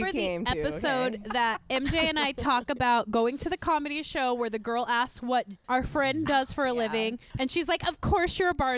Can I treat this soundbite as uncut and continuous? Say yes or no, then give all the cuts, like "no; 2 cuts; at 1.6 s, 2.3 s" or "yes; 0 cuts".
no; 2 cuts; at 5.6 s, 7.2 s